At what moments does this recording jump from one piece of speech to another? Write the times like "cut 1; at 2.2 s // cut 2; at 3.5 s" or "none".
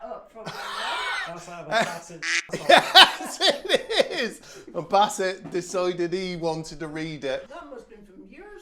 cut 1; at 7.5 s